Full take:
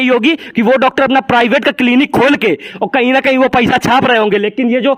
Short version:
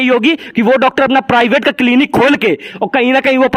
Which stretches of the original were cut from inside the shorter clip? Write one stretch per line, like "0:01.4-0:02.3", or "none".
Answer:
none